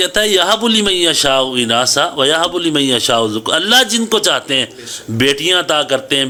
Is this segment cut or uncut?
uncut